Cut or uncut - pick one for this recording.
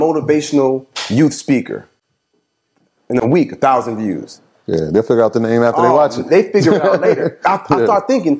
uncut